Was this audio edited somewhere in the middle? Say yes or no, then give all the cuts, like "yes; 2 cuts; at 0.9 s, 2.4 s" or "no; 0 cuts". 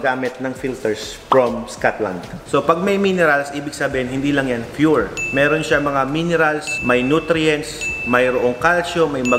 yes; 1 cut; at 2.3 s